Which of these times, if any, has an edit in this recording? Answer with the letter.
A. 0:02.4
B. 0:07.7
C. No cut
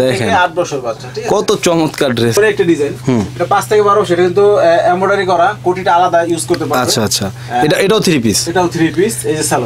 A